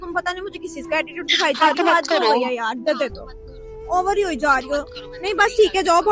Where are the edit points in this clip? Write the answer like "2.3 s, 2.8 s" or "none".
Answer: none